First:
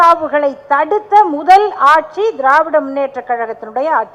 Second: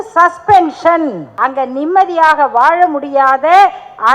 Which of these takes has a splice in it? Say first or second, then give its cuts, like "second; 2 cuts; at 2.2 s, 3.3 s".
second; 1 cut; at 1.3 s